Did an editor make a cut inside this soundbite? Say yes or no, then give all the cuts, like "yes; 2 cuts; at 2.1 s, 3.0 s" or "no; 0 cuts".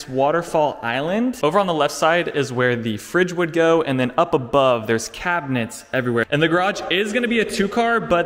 yes; 2 cuts; at 1.4 s, 6.3 s